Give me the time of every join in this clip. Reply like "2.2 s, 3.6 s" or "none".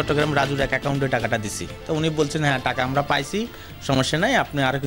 none